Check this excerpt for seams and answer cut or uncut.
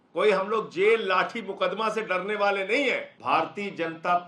cut